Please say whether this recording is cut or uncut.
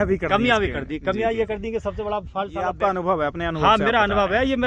cut